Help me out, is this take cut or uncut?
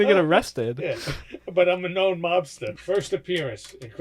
cut